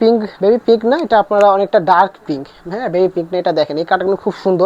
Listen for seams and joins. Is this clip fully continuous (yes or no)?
yes